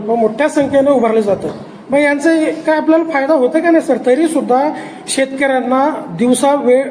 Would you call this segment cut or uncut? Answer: uncut